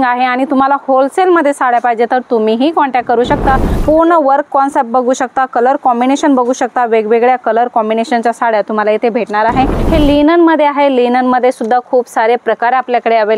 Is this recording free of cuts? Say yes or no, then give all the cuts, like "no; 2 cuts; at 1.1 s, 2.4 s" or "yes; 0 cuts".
no; 2 cuts; at 3.7 s, 9.8 s